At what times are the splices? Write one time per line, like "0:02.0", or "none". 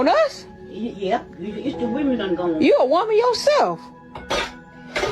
none

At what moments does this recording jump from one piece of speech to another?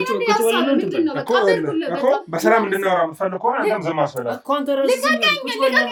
none

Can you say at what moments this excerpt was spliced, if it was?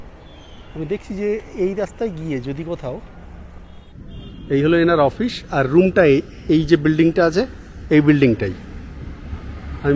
none

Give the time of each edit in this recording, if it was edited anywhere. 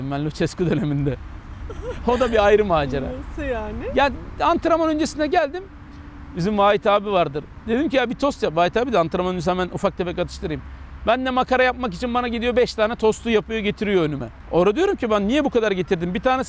none

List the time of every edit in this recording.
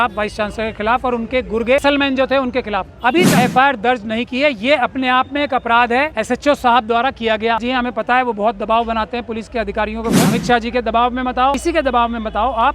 0:01.8
0:03.3
0:06.2
0:07.6
0:10.3
0:11.6

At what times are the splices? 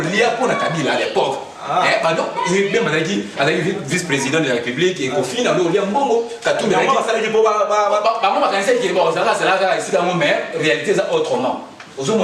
none

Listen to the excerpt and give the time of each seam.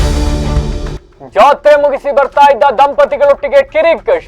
0:01.0

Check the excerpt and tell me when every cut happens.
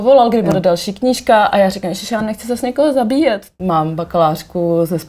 0:03.5

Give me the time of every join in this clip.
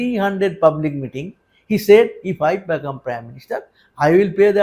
none

